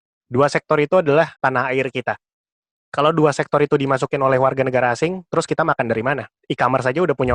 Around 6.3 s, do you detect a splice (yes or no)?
yes